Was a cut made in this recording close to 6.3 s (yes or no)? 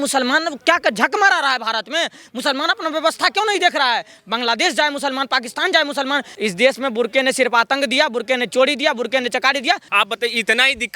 yes